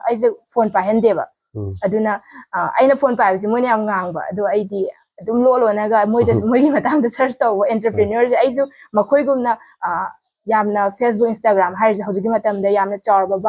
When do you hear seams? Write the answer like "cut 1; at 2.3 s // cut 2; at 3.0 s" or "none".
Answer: none

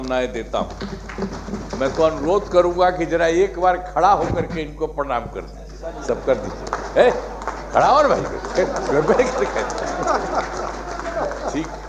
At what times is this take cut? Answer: none

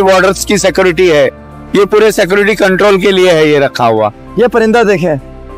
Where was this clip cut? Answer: cut 1; at 4.2 s

